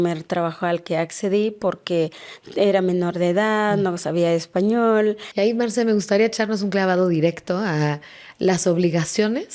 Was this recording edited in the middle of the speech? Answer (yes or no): yes